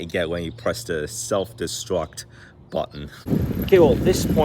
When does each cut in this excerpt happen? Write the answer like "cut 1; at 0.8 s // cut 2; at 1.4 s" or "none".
cut 1; at 3.2 s